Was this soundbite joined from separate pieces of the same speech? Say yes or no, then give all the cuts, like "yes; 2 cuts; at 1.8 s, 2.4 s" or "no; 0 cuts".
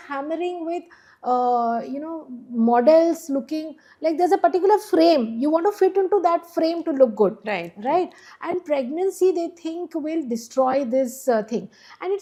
no; 0 cuts